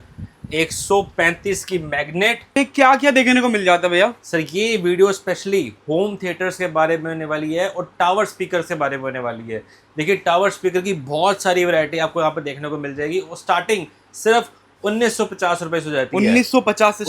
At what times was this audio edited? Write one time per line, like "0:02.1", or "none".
0:02.5